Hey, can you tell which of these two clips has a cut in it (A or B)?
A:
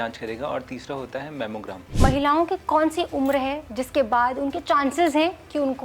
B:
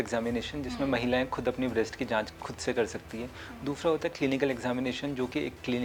A